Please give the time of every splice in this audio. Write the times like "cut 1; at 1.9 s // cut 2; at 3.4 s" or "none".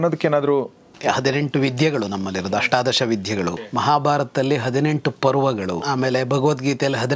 cut 1; at 0.9 s // cut 2; at 3.7 s // cut 3; at 5.8 s